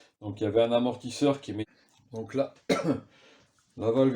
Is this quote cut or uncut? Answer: cut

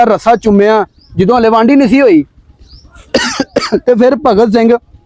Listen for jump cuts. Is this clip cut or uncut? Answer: uncut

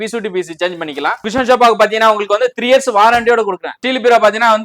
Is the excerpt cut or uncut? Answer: cut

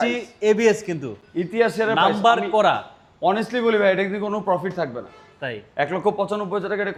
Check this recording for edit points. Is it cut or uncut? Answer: uncut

